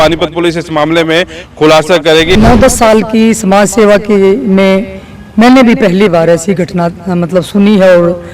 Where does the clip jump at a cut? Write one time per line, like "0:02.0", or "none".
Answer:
0:02.3